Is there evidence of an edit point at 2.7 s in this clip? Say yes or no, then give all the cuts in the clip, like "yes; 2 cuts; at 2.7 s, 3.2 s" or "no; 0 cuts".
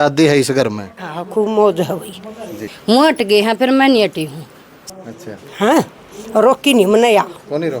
yes; 2 cuts; at 2.7 s, 4.7 s